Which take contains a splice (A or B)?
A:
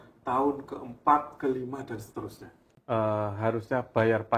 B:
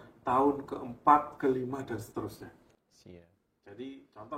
A